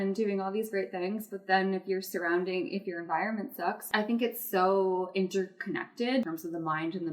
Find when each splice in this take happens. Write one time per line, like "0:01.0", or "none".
0:03.9
0:06.2